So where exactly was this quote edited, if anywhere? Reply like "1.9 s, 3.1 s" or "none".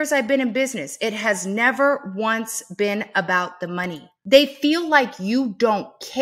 none